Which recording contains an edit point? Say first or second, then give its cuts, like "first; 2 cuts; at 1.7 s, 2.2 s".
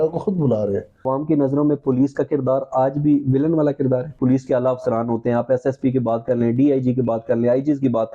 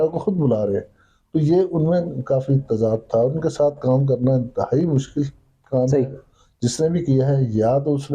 first; 2 cuts; at 1.1 s, 4.2 s